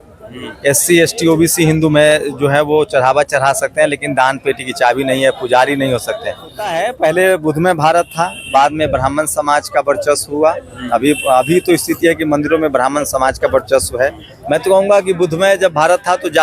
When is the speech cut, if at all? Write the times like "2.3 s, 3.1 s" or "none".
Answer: 6.7 s, 14.3 s